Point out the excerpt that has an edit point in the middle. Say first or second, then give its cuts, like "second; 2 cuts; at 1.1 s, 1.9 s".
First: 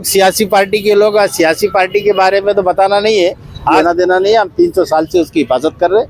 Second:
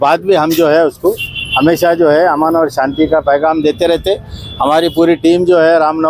first; 1 cut; at 3.8 s